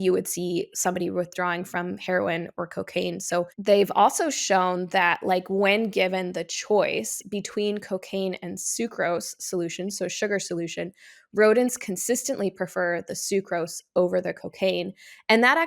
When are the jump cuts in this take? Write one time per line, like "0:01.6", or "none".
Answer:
0:03.5